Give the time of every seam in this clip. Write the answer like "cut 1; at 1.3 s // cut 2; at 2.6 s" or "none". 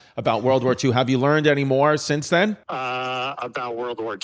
cut 1; at 2.6 s